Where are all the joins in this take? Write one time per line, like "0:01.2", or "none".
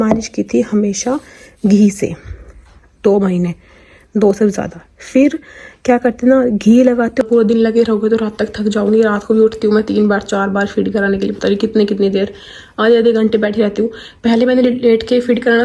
0:07.2